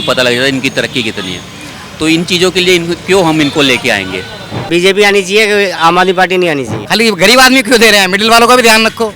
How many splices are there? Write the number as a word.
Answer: two